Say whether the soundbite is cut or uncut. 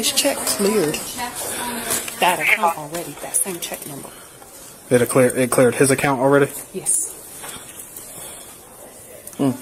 uncut